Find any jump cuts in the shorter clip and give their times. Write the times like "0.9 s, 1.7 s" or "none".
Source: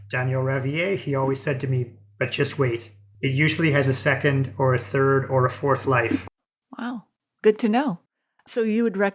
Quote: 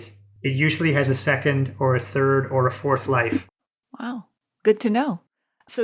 none